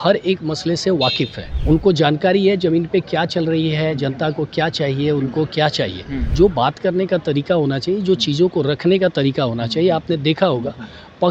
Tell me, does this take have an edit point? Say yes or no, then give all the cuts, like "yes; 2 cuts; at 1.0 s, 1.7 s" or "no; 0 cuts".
yes; 2 cuts; at 1.5 s, 6.2 s